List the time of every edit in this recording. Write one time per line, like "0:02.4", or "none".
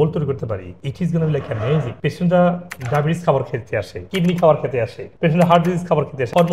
0:01.9